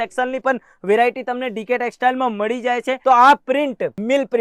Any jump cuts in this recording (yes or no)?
yes